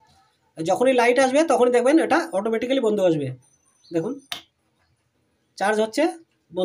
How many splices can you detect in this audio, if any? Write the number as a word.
zero